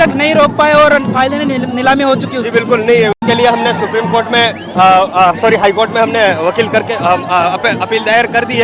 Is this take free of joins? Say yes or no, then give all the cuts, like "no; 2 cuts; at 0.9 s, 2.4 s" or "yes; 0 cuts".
yes; 0 cuts